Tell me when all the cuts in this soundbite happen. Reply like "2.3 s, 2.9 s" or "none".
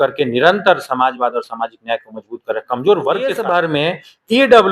3.4 s